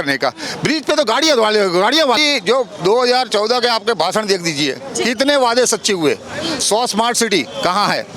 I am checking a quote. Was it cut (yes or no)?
yes